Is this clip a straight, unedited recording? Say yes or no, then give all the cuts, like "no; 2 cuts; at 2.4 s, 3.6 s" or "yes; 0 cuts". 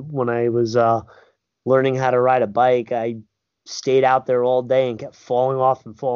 yes; 0 cuts